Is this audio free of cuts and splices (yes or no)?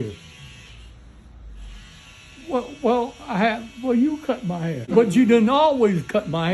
no